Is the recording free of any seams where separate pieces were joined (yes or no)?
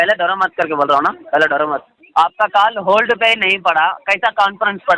no